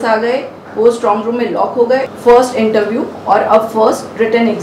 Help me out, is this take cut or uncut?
cut